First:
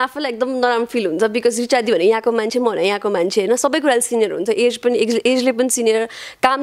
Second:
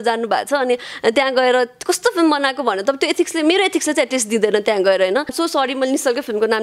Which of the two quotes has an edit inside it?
second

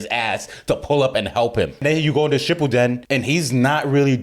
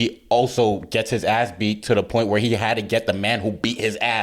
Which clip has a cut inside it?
first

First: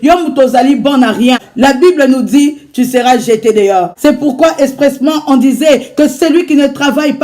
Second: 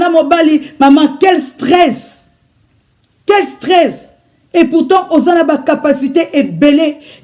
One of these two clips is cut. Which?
first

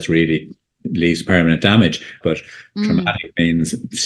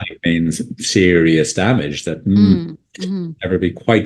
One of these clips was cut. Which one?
first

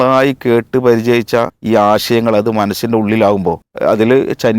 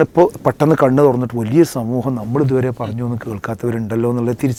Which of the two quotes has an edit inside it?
first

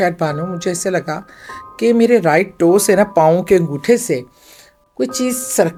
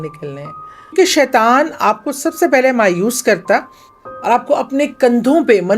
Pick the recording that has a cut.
second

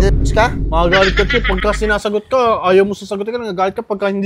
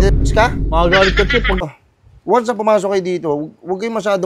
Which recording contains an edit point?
second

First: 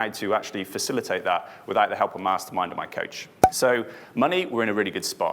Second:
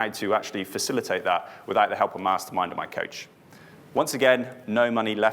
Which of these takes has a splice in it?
second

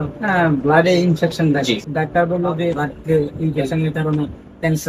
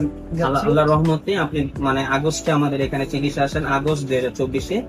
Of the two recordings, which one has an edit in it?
first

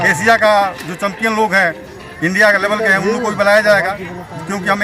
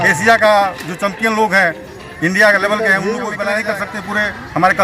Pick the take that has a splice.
second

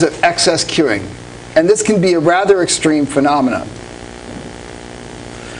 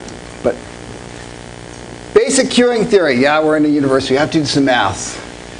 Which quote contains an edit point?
second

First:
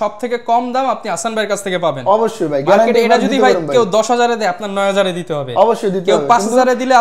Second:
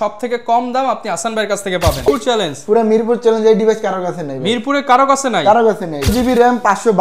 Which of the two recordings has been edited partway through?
second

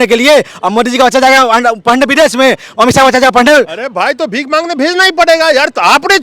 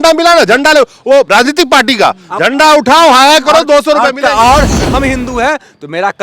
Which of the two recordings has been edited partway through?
second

